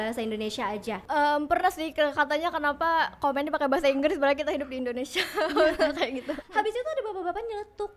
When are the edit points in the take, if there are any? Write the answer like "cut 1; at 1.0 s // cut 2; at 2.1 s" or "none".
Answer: cut 1; at 1.0 s // cut 2; at 6.4 s